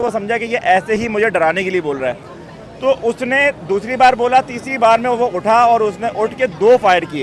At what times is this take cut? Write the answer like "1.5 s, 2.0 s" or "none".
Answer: none